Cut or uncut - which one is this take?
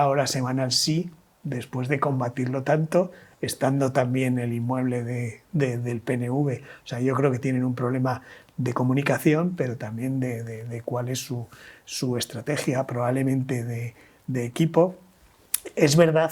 uncut